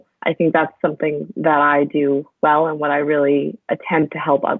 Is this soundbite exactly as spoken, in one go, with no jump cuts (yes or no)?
no